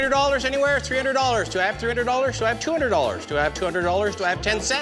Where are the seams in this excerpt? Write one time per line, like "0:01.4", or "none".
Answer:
none